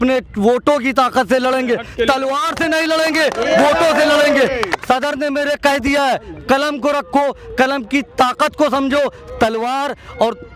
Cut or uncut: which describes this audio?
uncut